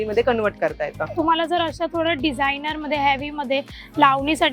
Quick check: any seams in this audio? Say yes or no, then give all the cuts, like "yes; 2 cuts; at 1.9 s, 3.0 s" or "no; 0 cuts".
yes; 1 cut; at 1.1 s